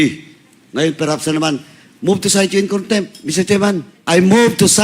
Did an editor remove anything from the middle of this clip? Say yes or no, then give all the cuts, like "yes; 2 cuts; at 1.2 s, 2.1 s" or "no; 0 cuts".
yes; 1 cut; at 3.9 s